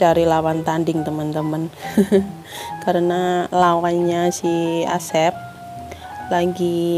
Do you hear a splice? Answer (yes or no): no